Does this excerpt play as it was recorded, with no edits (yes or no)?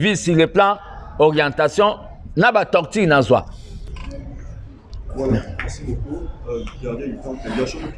no